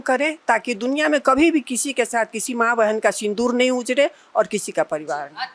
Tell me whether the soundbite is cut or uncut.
uncut